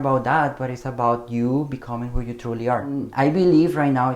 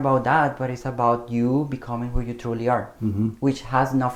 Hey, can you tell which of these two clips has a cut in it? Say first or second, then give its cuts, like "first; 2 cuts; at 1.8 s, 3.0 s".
first; 1 cut; at 3.0 s